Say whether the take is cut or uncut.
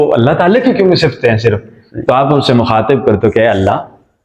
uncut